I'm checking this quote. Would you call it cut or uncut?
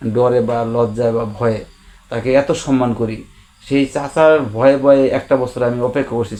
uncut